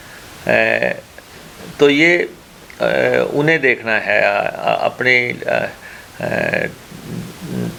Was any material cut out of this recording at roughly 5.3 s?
no; 0 cuts

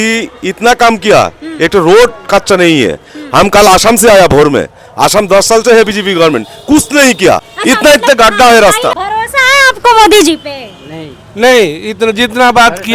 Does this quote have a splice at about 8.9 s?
yes; 2 cuts; at 7.5 s, 8.9 s

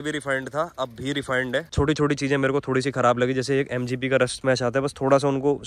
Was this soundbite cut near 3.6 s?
no; 1 cut; at 1.7 s

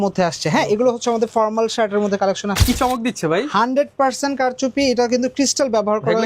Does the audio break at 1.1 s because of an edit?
no; 1 cut; at 2.6 s

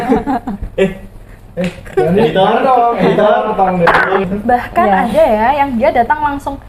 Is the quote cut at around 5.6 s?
no; 1 cut; at 4.2 s

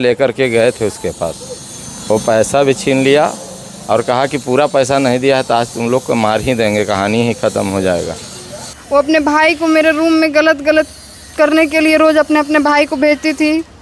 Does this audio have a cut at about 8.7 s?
yes; 1 cut; at 8.7 s

